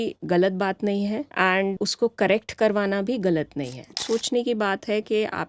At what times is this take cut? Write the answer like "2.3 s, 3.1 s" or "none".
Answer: 1.7 s, 4.0 s